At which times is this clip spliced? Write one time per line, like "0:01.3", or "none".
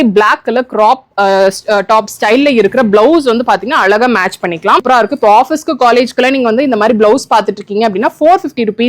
0:04.8